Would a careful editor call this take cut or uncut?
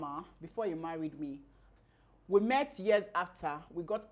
cut